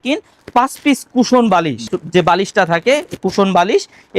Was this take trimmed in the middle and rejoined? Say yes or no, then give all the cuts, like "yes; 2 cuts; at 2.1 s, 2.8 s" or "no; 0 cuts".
no; 0 cuts